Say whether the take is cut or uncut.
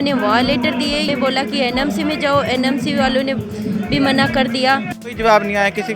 cut